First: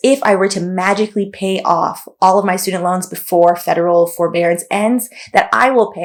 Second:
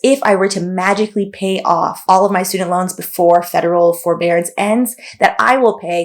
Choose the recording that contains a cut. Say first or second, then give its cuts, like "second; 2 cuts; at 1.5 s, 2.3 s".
second; 1 cut; at 2.0 s